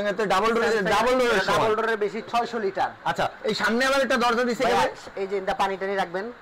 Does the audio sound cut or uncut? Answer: uncut